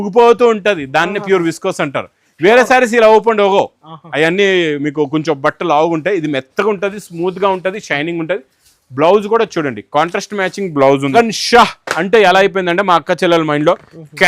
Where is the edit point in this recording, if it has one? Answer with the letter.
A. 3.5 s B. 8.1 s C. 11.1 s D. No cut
C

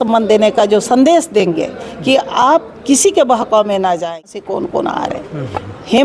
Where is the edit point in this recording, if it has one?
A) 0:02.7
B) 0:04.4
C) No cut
B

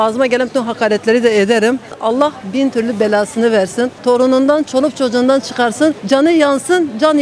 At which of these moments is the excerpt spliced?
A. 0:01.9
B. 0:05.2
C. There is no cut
A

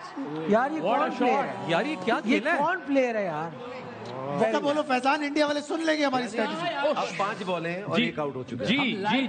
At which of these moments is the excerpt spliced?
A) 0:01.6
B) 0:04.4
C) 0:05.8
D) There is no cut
B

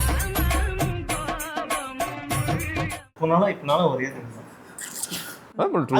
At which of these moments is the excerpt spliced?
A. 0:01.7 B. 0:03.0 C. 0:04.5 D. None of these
B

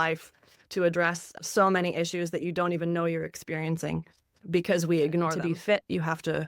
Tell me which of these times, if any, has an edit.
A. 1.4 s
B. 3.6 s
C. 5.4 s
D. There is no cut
C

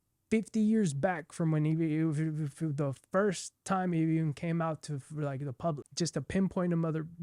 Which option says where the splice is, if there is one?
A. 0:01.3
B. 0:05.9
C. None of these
B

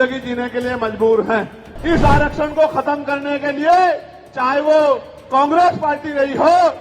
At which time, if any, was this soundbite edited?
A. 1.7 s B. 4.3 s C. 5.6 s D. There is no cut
A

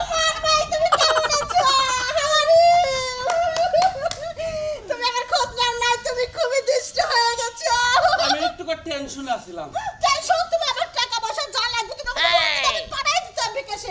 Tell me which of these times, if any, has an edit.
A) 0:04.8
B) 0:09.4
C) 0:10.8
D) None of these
D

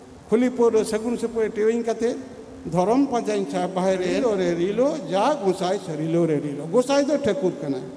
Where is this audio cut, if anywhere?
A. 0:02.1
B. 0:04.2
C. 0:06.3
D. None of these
B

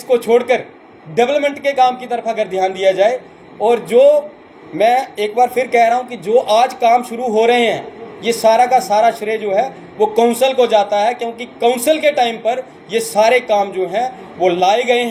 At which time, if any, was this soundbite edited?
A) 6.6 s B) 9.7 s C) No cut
C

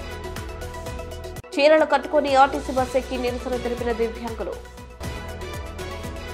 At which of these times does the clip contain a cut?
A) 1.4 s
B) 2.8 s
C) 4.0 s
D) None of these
D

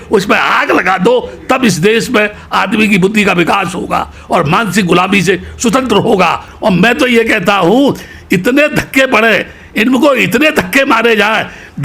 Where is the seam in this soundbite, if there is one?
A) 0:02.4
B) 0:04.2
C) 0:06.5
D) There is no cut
C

